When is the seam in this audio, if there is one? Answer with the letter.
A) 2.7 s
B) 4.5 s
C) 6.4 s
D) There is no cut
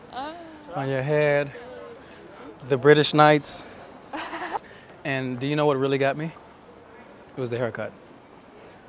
B